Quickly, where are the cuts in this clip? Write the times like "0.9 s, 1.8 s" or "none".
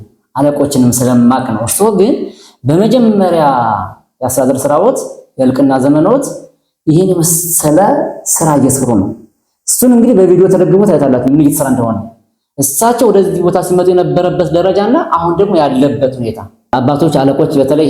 16.7 s